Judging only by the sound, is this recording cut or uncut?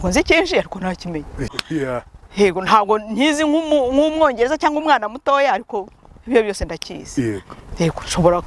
cut